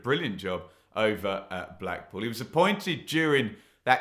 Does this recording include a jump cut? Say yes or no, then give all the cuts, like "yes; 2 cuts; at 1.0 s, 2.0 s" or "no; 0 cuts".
no; 0 cuts